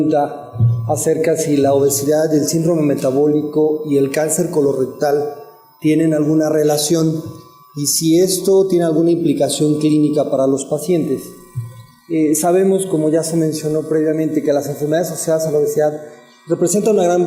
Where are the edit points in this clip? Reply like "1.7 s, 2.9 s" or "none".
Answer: none